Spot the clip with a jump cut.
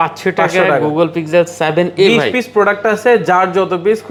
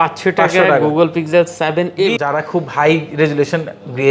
second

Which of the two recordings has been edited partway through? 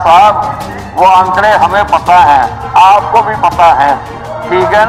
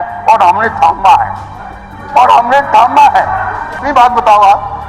second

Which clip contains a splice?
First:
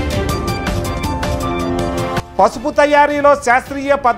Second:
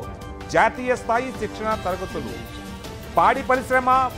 first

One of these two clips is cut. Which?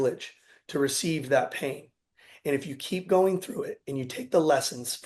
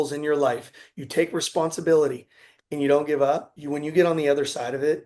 second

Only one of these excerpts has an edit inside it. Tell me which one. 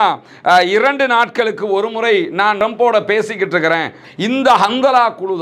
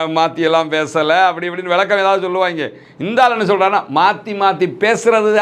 first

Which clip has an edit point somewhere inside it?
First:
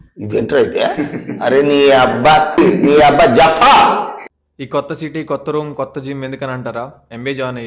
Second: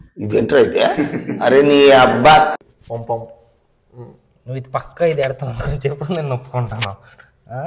second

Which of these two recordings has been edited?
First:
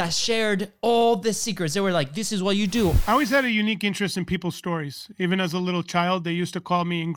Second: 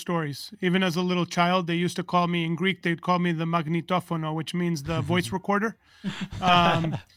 first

